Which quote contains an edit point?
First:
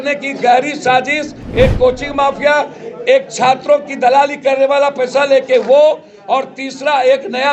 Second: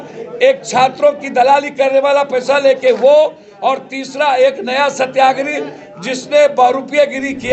first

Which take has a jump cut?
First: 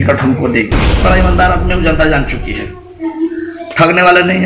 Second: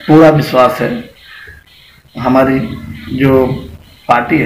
first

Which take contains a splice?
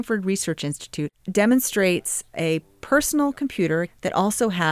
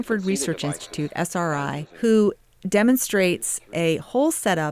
first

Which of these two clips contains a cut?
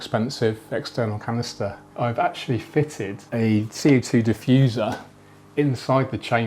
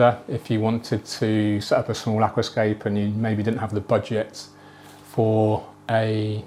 first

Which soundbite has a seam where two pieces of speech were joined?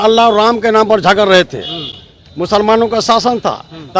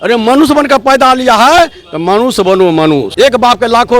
second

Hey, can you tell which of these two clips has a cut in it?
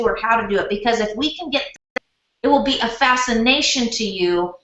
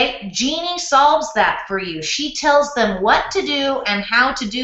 first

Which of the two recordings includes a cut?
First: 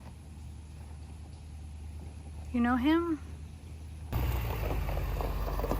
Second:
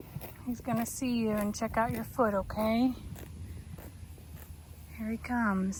first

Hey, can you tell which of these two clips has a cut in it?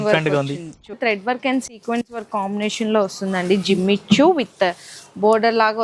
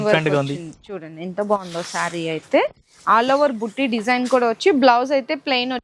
first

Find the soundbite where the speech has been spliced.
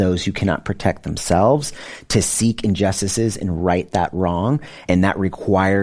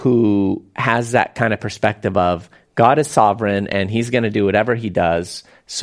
first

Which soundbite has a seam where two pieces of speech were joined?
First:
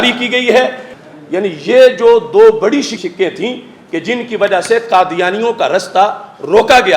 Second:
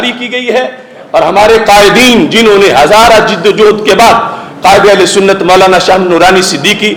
first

